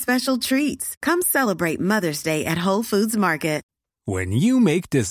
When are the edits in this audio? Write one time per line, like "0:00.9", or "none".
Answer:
0:03.7